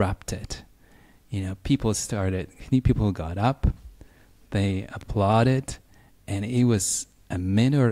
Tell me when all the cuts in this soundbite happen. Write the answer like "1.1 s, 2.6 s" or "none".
none